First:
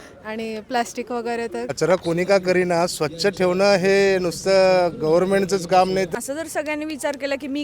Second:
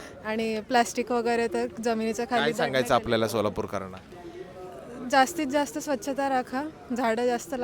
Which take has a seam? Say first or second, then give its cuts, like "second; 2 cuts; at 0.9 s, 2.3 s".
first; 2 cuts; at 1.7 s, 6.1 s